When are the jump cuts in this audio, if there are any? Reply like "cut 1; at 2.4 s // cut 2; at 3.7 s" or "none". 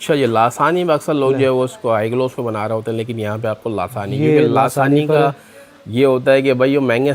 none